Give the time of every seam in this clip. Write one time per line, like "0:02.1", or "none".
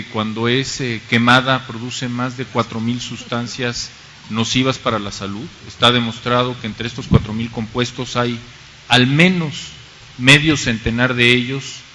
0:05.2